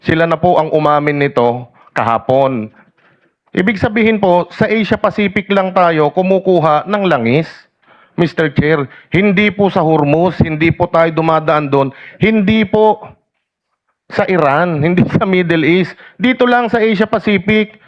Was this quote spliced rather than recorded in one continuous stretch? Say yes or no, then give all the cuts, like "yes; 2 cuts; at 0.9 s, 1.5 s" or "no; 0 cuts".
no; 0 cuts